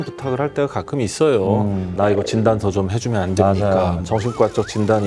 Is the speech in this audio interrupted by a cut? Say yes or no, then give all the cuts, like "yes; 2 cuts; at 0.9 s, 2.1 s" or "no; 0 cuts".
yes; 2 cuts; at 1.9 s, 4.0 s